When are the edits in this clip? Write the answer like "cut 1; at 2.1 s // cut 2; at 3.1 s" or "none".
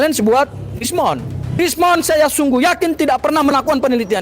cut 1; at 1.6 s

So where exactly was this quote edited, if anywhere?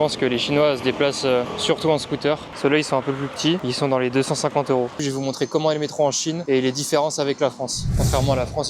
cut 1; at 1.5 s // cut 2; at 2.5 s // cut 3; at 5.0 s // cut 4; at 7.8 s

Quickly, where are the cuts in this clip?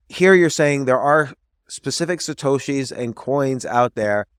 none

